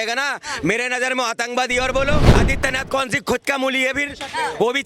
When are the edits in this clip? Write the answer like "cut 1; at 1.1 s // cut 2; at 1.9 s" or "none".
cut 1; at 2.3 s